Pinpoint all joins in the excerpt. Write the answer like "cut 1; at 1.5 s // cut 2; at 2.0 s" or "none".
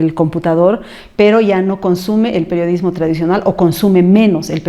none

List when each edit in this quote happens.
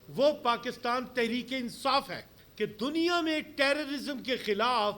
cut 1; at 2.4 s

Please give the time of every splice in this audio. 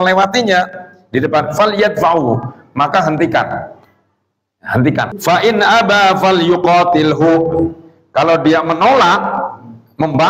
cut 1; at 5.1 s

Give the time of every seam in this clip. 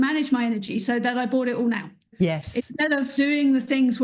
cut 1; at 2.1 s // cut 2; at 3.1 s

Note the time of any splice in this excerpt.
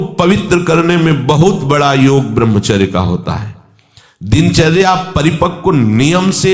none

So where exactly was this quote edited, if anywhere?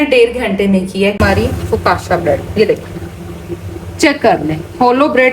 cut 1; at 1.2 s

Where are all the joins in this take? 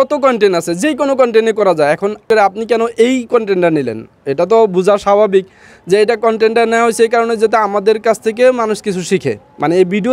cut 1; at 2.2 s

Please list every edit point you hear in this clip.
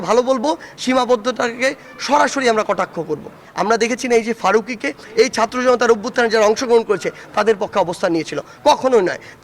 cut 1; at 3.4 s // cut 2; at 5.0 s

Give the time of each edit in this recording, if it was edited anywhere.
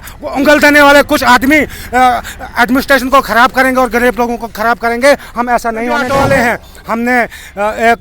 cut 1; at 6.1 s

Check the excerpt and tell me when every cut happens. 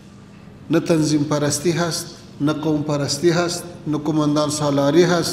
none

